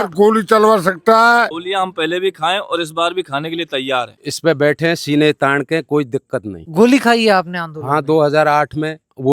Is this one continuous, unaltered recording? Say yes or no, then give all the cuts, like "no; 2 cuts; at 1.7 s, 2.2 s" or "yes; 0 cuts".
no; 3 cuts; at 1.5 s, 4.2 s, 6.7 s